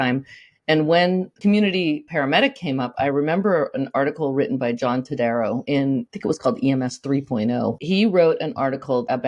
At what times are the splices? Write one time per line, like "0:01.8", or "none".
0:01.3
0:02.1